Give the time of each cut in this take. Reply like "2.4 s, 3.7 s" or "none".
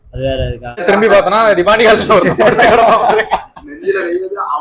1.0 s

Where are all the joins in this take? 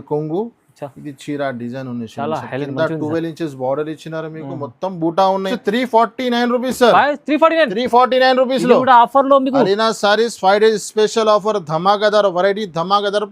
5.5 s

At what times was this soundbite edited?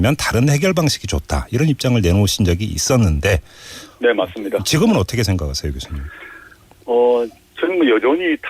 4.1 s

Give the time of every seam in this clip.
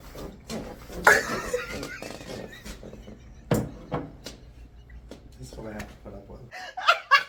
none

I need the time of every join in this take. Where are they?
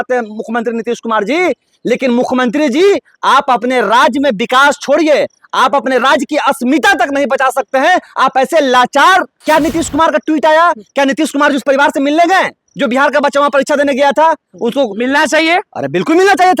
9.3 s

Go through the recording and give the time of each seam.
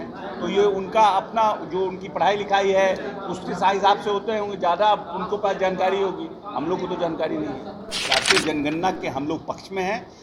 8.0 s

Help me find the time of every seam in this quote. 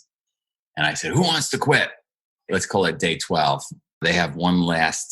2.5 s, 4.0 s

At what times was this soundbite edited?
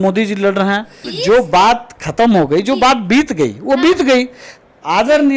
1.0 s

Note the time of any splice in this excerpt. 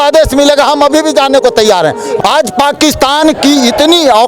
2.1 s

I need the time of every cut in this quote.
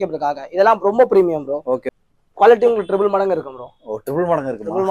1.8 s

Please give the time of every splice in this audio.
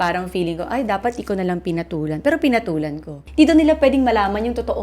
3.2 s

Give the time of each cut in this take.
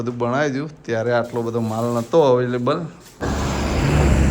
3.2 s

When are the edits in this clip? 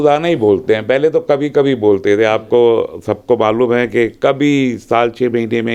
none

